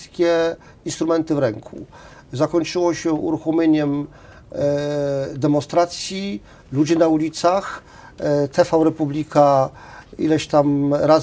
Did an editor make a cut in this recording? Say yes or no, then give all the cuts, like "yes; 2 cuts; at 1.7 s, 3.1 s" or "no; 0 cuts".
no; 0 cuts